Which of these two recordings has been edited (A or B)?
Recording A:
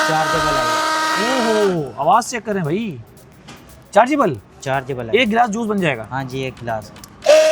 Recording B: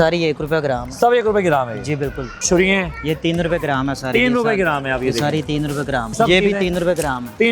B